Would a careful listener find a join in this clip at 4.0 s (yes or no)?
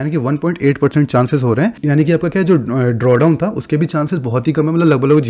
no